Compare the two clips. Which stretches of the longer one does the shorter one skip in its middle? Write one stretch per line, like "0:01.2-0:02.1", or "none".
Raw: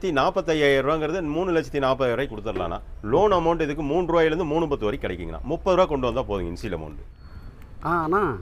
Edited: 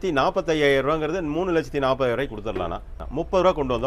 0:02.9-0:05.3

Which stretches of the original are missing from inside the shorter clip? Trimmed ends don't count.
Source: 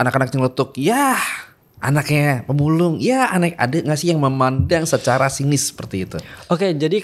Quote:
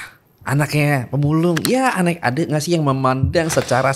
none

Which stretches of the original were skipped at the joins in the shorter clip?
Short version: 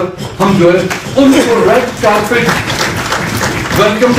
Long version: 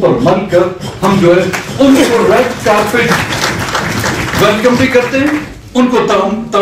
none

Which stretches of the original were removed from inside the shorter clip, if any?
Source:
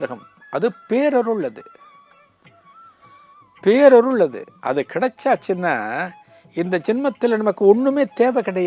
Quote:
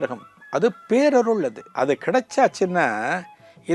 0:01.6-0:04.5

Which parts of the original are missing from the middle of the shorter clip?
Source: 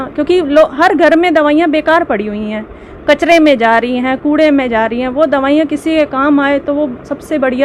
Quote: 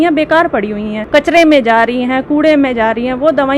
0:02.5-0:02.9

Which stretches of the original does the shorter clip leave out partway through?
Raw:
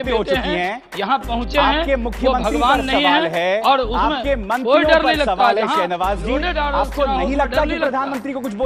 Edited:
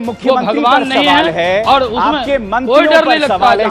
none

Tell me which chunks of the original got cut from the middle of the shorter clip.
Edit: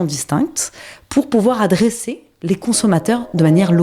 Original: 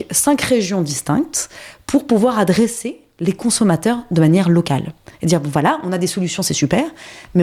none

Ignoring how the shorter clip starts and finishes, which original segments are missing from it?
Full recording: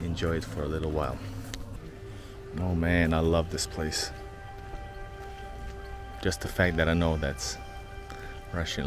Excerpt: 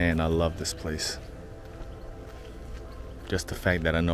none

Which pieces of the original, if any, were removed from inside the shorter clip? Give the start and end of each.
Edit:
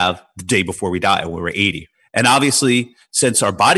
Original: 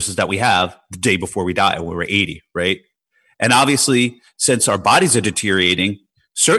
0:02.4-0:03.1

